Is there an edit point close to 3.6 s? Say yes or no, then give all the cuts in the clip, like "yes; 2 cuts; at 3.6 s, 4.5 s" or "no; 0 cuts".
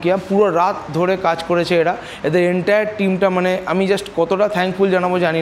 no; 0 cuts